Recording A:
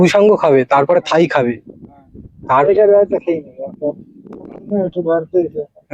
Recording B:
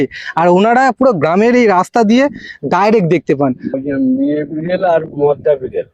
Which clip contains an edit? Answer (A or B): B